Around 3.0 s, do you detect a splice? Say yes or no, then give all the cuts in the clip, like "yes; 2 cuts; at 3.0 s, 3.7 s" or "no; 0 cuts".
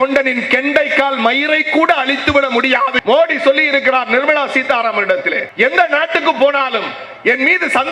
yes; 2 cuts; at 3.0 s, 5.4 s